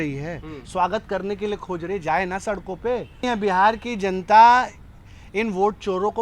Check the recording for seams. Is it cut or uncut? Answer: cut